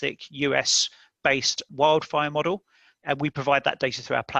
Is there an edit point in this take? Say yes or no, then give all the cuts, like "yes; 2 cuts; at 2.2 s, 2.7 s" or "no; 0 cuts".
yes; 2 cuts; at 1.7 s, 3.0 s